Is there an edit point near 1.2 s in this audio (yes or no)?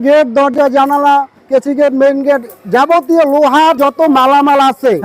no